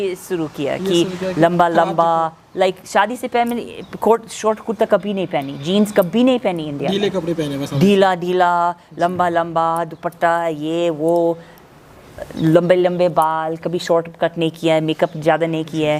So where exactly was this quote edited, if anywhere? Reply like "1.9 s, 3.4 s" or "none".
none